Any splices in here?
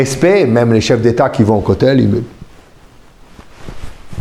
no; 0 cuts

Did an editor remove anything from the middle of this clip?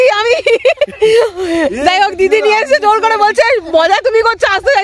no; 0 cuts

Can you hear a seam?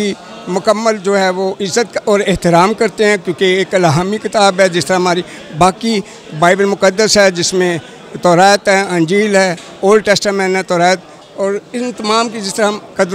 no; 0 cuts

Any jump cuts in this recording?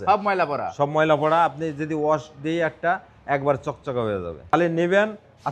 yes; 1 cut; at 4.5 s

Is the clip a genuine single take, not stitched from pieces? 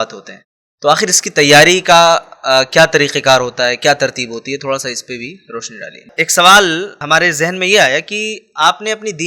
no; 1 cut; at 6.0 s

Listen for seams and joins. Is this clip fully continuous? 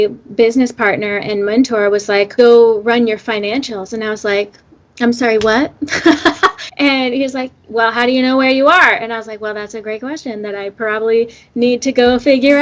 no; 2 cuts; at 2.3 s, 6.6 s

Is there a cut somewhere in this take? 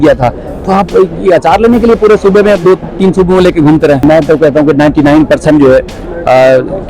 yes; 1 cut; at 4.0 s

